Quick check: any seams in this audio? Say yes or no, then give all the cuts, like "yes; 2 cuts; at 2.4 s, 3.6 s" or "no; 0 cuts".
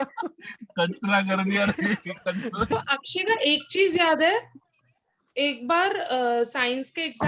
yes; 1 cut; at 2.7 s